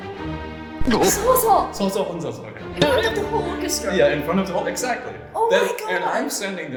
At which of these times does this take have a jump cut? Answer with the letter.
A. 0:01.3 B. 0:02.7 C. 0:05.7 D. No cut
D